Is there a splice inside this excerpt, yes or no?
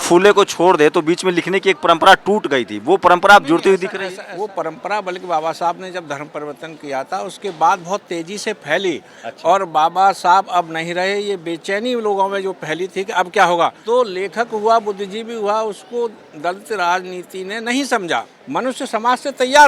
yes